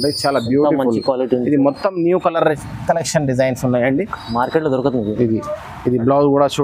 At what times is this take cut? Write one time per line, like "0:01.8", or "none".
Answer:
none